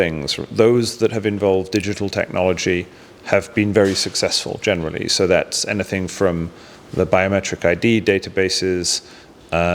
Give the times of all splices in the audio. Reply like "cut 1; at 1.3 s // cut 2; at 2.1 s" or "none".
none